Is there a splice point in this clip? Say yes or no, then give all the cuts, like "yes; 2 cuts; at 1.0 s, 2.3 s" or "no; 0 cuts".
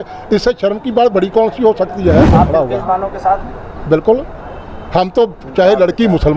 yes; 1 cut; at 2.3 s